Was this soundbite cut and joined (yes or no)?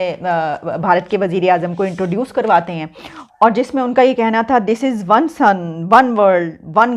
no